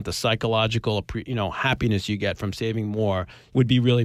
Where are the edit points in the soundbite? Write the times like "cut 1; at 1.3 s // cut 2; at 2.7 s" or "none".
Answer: none